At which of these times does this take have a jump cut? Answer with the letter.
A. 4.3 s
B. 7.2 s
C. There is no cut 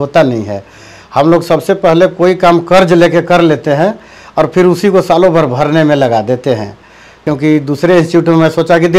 B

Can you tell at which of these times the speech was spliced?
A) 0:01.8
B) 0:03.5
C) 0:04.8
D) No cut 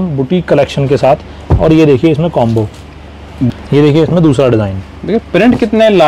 B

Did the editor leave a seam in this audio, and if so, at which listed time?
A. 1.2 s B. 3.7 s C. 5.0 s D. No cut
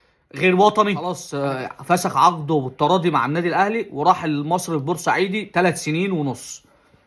A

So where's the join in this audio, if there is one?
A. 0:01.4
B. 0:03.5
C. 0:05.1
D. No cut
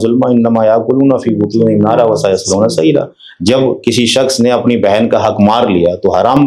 D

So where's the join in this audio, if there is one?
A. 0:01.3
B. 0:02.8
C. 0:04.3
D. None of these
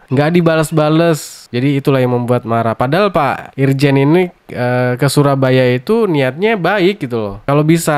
D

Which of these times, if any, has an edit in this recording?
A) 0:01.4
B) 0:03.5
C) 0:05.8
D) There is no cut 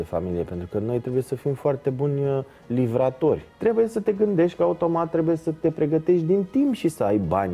B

